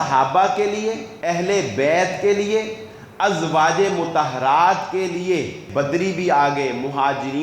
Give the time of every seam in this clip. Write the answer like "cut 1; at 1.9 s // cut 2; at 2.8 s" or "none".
cut 1; at 1.1 s // cut 2; at 5.6 s